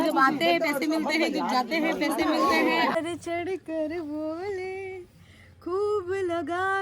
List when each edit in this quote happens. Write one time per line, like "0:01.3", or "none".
0:03.0